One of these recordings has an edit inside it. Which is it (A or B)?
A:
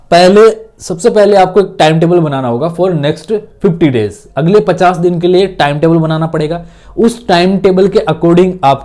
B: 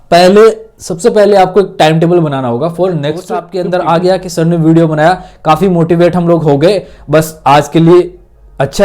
B